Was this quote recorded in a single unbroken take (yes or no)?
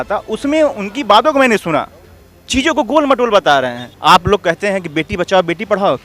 no